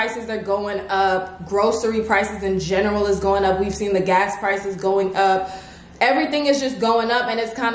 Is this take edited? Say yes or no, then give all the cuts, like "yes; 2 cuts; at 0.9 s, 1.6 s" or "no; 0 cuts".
no; 0 cuts